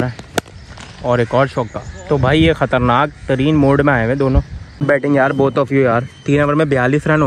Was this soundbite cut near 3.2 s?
no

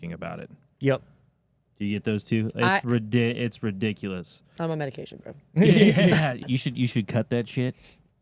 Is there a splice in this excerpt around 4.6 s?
no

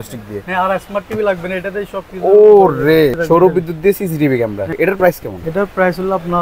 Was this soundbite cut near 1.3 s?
no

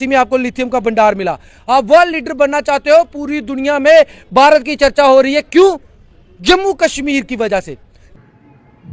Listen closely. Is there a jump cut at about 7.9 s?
yes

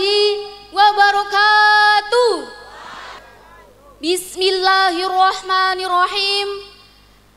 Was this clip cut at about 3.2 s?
yes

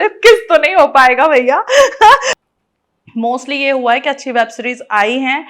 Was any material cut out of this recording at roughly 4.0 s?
no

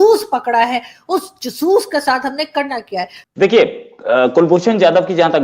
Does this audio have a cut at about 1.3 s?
no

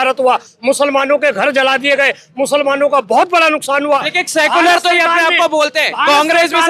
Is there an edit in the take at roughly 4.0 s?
no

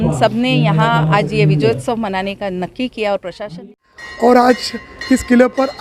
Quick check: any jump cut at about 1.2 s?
no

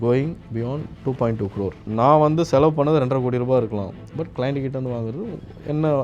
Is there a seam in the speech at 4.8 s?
no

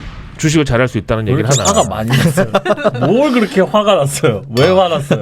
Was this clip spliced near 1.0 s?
no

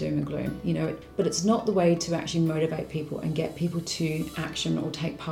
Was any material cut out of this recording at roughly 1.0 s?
yes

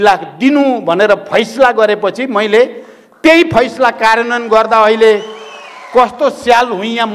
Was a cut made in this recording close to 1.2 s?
no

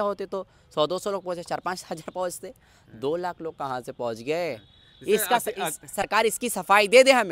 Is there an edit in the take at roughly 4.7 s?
no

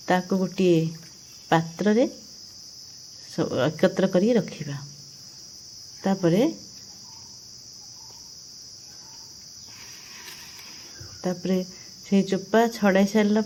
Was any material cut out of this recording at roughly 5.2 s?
no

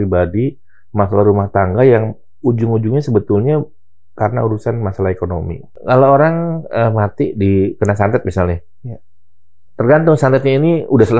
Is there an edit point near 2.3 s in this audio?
no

